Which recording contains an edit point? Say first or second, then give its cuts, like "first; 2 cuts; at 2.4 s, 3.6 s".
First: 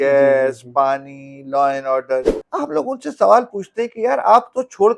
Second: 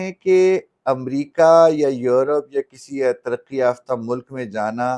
first; 1 cut; at 2.4 s